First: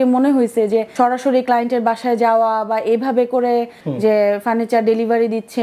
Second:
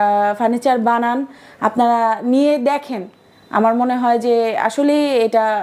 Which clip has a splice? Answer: first; 2 cuts; at 0.9 s, 3.8 s

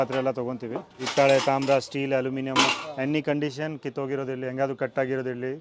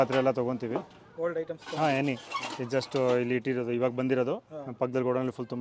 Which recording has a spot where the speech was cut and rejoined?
first; 1 cut; at 1.0 s

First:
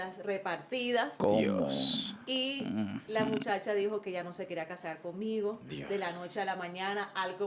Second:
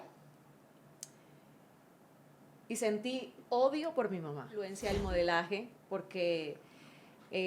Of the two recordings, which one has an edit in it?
second; 1 cut; at 4.7 s

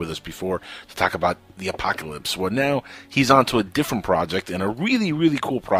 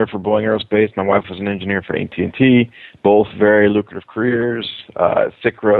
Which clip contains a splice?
first; 1 cut; at 2.3 s

